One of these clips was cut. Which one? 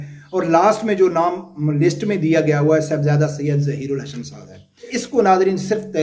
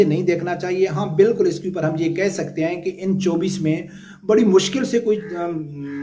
first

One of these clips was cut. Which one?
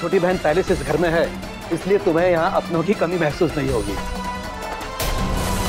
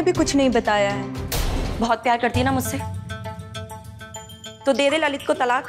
second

